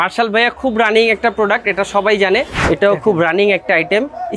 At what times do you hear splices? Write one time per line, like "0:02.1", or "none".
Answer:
0:02.6